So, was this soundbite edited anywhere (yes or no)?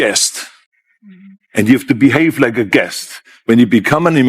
yes